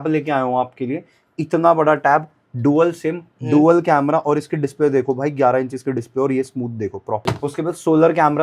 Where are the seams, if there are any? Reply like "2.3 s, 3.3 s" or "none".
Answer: 7.2 s